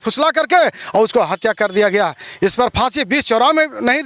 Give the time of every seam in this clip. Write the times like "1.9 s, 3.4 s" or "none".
none